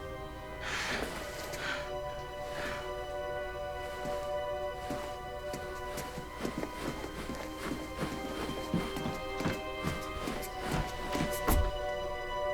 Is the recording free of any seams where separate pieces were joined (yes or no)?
yes